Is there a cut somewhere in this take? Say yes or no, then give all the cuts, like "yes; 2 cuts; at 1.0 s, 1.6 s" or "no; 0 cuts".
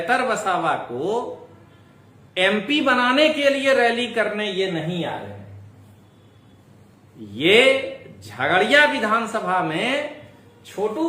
no; 0 cuts